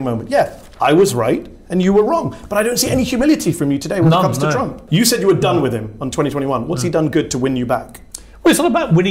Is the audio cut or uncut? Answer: cut